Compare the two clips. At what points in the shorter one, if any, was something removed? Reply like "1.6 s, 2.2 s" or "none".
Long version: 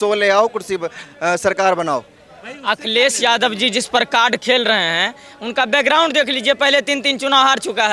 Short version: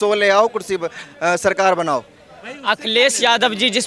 none